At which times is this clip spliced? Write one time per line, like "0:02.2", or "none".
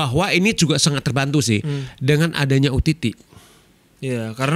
none